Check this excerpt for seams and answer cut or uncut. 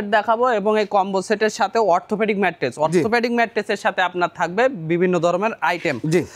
uncut